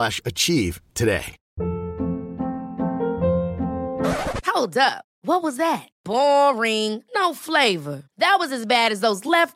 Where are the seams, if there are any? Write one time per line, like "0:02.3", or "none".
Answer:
0:01.4